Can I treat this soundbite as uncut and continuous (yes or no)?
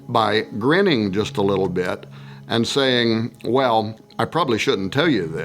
no